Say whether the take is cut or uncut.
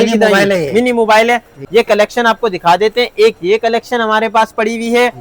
cut